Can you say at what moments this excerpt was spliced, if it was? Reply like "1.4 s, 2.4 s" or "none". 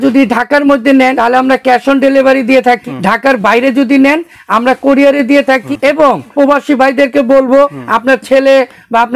1.2 s, 2.8 s, 6.2 s, 7.8 s

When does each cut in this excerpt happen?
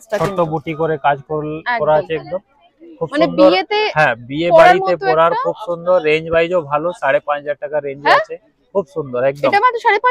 none

